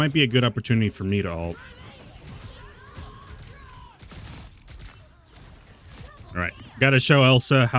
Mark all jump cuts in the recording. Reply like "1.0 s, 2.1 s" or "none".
none